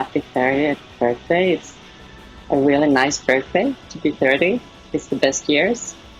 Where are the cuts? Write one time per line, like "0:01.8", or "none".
0:03.4